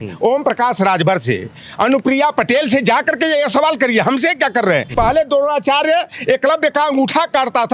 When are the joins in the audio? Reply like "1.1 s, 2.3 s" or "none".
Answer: 4.9 s